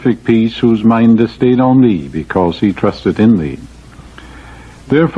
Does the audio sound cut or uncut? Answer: cut